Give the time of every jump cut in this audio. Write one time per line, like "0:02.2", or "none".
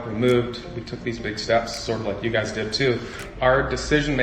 0:03.2